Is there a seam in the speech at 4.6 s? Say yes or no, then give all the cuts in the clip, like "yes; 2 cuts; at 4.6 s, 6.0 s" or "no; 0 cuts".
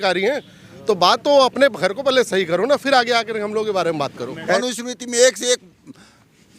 yes; 1 cut; at 4.6 s